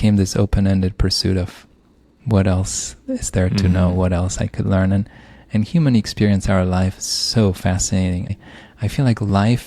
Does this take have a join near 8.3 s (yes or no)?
yes